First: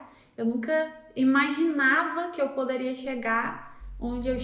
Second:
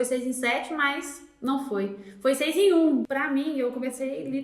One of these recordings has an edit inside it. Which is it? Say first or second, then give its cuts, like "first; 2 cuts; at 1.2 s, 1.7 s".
second; 1 cut; at 3.1 s